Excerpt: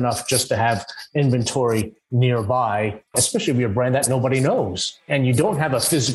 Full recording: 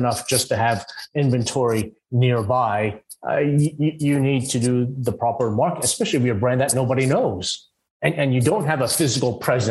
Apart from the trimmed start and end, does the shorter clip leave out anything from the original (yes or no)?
yes